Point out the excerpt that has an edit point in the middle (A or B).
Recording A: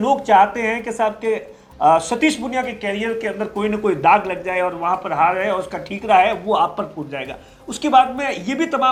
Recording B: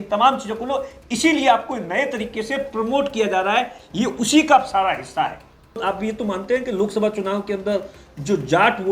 B